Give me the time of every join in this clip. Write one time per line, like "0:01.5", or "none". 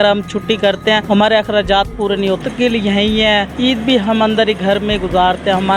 0:01.0
0:02.4
0:03.5